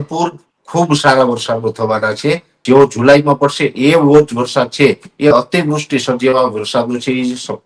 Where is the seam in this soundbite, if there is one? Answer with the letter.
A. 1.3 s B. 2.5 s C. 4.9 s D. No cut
B